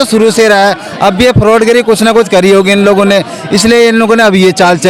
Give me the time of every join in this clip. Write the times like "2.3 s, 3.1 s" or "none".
none